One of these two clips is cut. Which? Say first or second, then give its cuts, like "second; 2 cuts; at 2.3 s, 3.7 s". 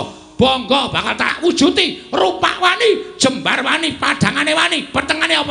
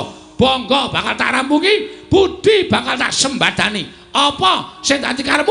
first; 1 cut; at 1.3 s